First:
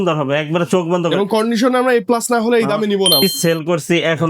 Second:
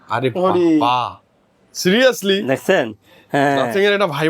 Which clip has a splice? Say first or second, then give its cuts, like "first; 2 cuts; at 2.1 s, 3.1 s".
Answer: first; 1 cut; at 3.2 s